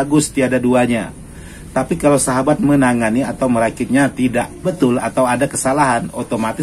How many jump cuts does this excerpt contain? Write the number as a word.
one